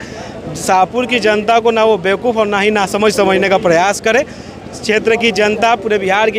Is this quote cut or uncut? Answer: uncut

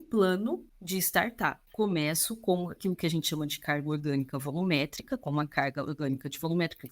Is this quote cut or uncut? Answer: cut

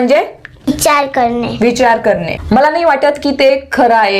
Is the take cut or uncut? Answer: uncut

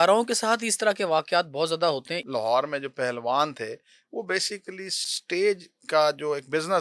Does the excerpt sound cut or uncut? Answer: cut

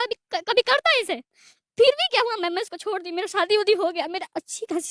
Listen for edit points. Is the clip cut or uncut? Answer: uncut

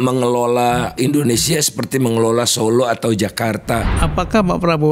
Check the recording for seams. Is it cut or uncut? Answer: cut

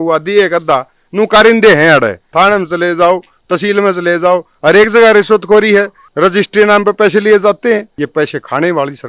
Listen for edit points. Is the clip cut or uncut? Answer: cut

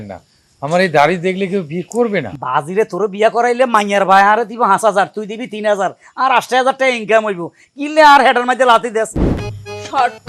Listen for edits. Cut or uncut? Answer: cut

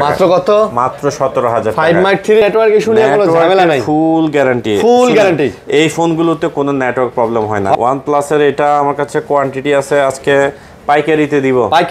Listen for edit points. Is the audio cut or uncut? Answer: cut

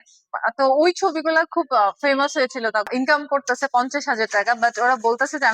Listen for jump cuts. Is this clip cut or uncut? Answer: cut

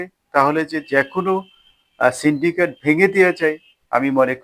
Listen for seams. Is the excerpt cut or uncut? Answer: uncut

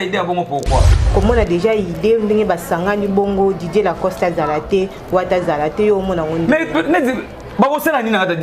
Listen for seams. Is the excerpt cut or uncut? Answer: cut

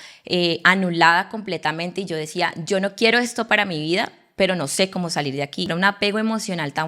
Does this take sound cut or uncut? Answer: cut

